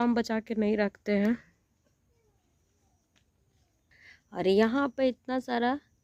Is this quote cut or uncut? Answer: uncut